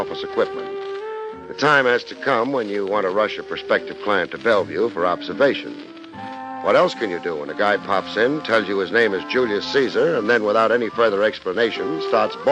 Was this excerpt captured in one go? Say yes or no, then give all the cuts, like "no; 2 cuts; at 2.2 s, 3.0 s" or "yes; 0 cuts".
no; 1 cut; at 6.2 s